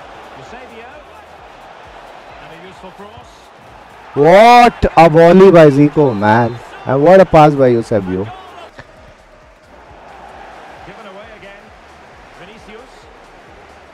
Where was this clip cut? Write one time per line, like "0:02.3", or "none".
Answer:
0:08.7